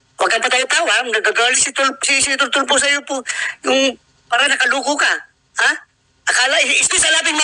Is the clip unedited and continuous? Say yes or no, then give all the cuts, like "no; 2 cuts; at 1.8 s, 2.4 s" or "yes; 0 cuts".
yes; 0 cuts